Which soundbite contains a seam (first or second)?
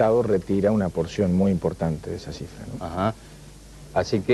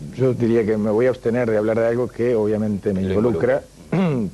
first